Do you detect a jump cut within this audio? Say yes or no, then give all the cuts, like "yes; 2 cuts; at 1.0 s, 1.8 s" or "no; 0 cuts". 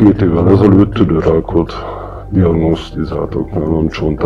no; 0 cuts